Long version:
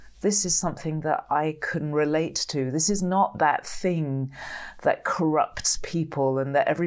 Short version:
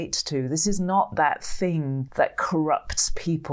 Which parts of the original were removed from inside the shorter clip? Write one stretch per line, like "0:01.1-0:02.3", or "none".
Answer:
0:04.2-0:04.7